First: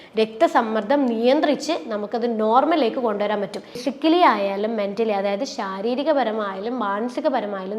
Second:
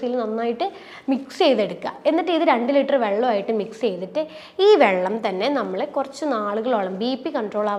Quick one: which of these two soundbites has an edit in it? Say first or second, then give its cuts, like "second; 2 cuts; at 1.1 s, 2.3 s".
first; 1 cut; at 3.8 s